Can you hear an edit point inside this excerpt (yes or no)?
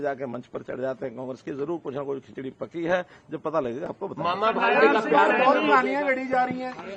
no